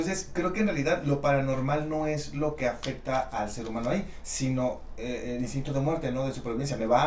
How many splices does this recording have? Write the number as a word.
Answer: zero